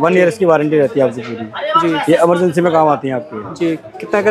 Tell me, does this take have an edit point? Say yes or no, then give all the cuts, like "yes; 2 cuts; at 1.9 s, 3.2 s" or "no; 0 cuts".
no; 0 cuts